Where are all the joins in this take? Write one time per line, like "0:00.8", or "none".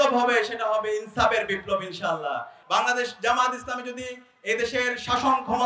0:02.5